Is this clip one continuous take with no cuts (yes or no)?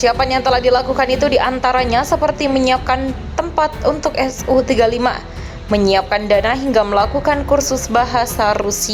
yes